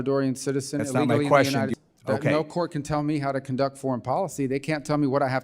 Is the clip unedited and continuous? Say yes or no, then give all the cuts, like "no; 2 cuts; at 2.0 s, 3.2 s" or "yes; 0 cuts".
no; 1 cut; at 1.8 s